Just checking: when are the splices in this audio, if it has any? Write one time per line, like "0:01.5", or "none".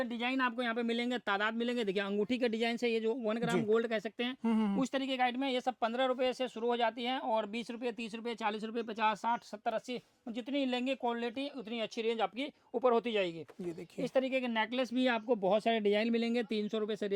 none

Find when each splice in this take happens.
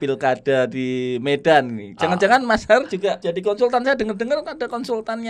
0:03.2

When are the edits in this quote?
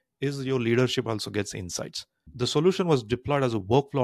0:02.2

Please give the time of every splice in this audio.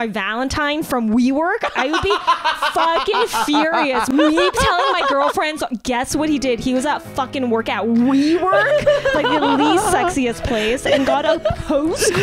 0:04.1

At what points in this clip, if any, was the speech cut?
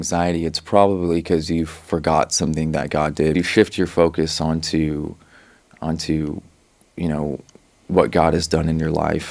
0:03.3

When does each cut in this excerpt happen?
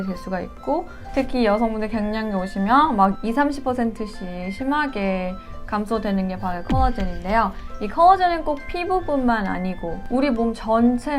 0:01.1

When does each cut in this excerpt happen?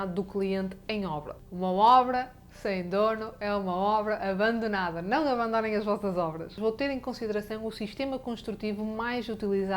0:01.3
0:06.5

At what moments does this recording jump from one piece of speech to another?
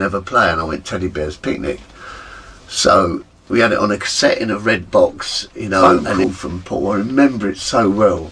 0:06.0

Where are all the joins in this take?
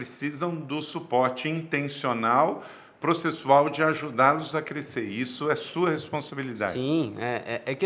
none

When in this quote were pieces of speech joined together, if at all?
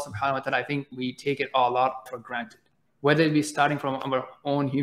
0:00.9
0:02.1

